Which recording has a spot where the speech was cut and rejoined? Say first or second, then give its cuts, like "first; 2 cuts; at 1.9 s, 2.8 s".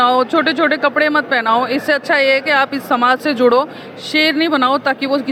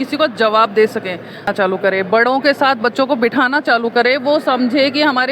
second; 1 cut; at 1.5 s